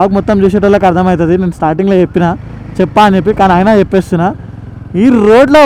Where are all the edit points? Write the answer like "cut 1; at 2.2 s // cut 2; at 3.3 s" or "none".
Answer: none